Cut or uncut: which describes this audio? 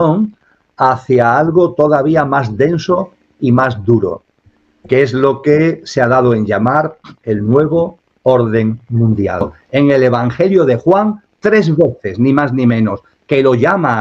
cut